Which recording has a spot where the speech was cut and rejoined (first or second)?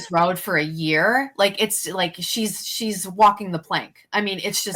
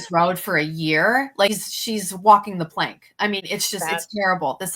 second